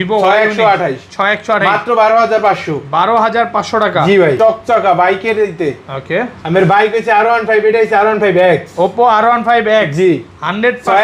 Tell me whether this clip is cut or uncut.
cut